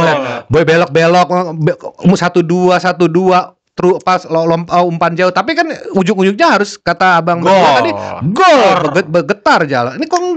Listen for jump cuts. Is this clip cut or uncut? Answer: uncut